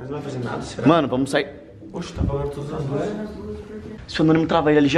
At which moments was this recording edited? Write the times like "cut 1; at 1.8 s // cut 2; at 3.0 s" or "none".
cut 1; at 4.0 s